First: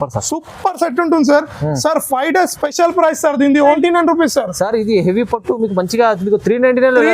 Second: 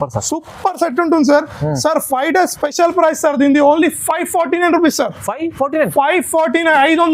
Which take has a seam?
first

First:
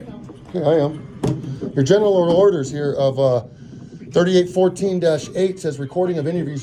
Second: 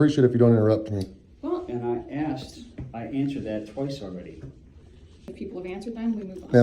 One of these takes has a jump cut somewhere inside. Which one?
second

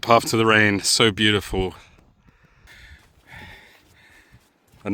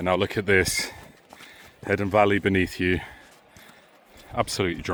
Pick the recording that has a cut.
first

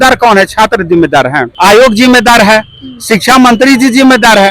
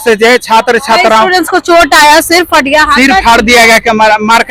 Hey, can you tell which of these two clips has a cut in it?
first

